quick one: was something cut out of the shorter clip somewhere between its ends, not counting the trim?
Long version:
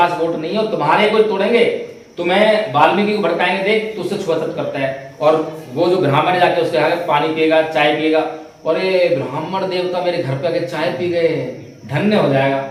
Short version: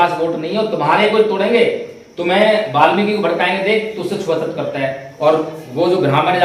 no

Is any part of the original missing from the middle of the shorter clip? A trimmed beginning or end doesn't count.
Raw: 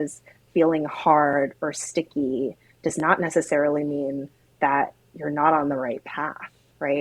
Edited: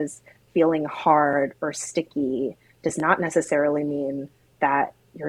no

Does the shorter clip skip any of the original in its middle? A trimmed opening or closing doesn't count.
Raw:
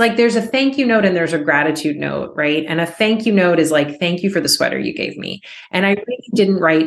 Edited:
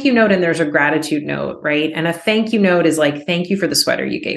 no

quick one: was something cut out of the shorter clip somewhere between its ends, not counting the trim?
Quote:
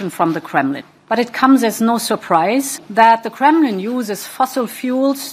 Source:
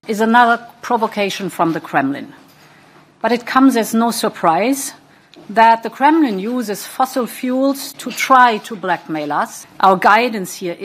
yes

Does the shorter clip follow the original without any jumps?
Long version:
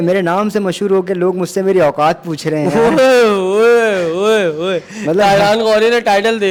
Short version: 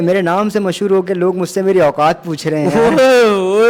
yes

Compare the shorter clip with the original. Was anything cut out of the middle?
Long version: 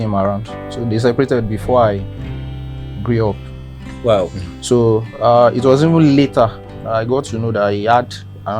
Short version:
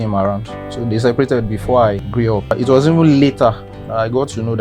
yes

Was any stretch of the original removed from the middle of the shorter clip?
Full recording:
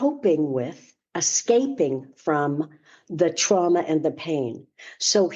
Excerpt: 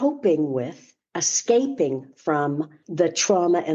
yes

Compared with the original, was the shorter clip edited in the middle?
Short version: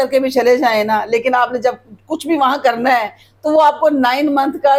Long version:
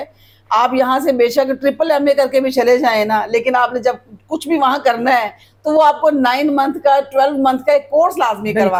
no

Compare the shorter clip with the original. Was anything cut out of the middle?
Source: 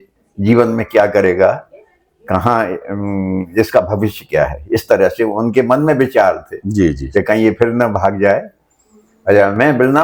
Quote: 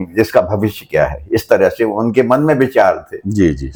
no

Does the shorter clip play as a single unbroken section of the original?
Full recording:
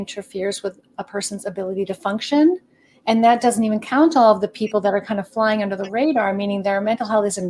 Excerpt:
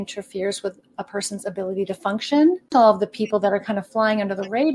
no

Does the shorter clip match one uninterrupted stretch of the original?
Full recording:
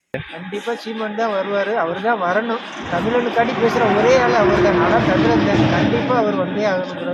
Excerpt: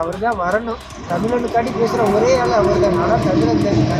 yes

